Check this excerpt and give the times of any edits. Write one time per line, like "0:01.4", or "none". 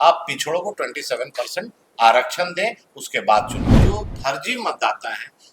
0:03.8

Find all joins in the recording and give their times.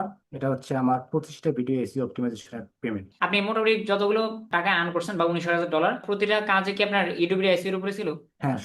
0:03.1
0:06.1

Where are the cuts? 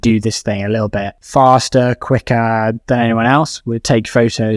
0:01.2

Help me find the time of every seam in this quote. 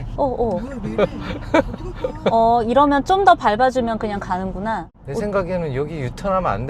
0:04.9

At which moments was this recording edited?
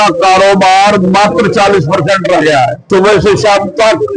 0:02.8

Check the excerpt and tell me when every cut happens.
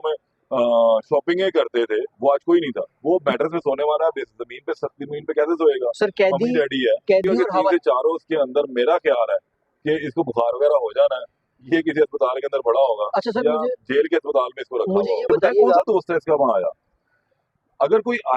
0:02.9
0:07.5
0:15.8

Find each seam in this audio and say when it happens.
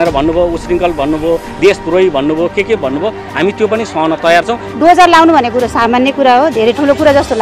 0:04.6

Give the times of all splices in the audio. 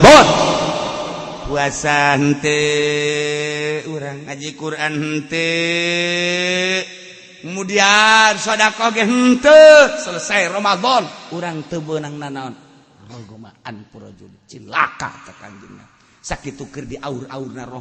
none

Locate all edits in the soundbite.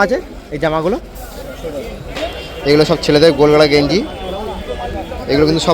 0:02.0

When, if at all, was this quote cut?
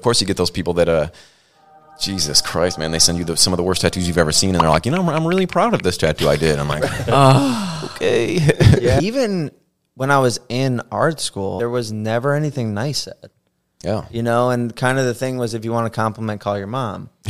0:09.0
0:11.6

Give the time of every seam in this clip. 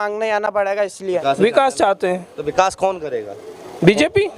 0:01.2

